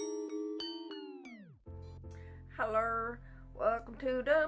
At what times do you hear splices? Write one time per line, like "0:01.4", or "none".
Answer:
none